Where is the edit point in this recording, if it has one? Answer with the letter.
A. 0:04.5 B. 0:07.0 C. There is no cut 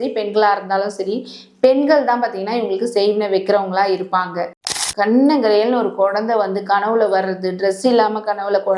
A